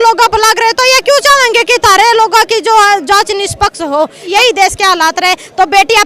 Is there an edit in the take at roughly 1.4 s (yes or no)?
no